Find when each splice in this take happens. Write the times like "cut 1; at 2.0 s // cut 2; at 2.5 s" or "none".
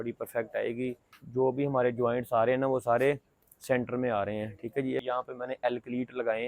cut 1; at 1.2 s // cut 2; at 5.0 s